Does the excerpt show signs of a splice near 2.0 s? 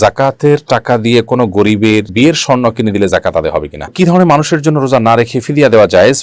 no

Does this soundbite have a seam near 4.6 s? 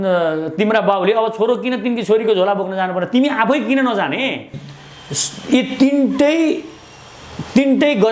yes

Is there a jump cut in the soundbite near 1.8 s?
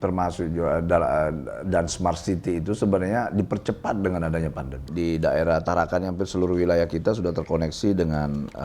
no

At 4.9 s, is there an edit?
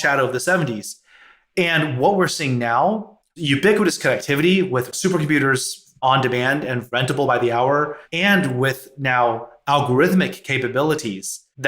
yes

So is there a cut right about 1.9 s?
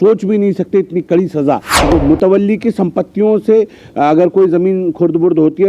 yes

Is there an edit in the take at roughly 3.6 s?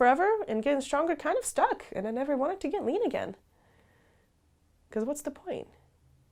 no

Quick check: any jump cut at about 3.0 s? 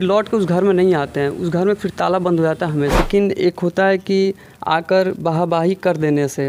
yes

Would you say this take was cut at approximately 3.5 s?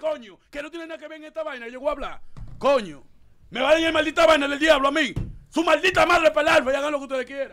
no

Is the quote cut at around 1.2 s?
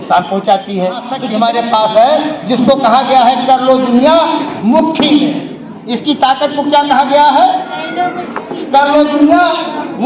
yes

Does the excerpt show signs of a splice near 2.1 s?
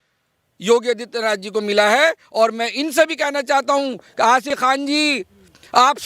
no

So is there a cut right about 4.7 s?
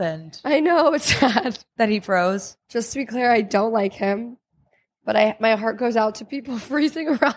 no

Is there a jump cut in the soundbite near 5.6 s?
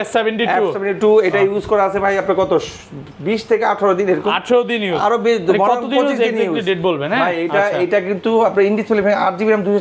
no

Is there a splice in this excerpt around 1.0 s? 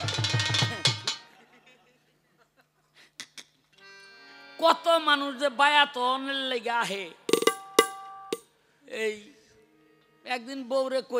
yes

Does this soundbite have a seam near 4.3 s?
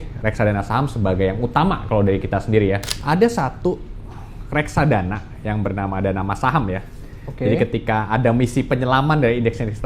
no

